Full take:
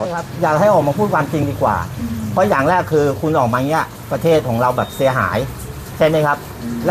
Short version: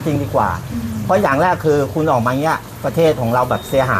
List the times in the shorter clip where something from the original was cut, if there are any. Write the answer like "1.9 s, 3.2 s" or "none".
none